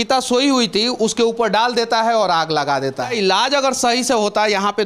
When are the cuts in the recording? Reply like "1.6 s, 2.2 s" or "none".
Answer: 3.1 s